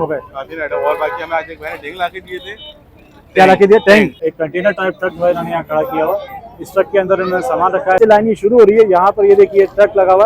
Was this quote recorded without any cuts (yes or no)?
no